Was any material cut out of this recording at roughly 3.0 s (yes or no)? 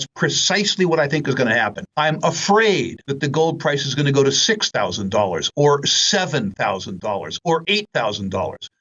yes